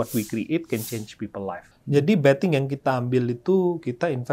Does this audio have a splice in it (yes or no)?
yes